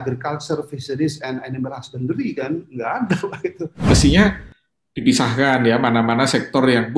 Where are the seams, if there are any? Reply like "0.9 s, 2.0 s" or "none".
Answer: 3.9 s